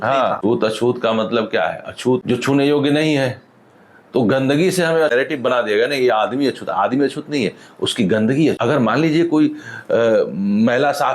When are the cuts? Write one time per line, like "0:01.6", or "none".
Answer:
none